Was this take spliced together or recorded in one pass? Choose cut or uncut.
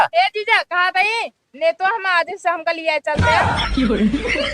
cut